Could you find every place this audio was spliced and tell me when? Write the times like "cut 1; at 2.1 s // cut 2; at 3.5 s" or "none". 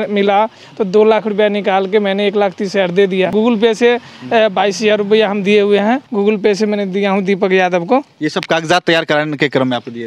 cut 1; at 3.3 s // cut 2; at 6.1 s